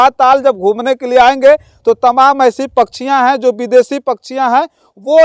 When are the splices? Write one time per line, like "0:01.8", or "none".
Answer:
none